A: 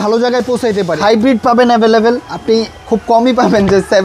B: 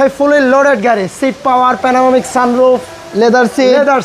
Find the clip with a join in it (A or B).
A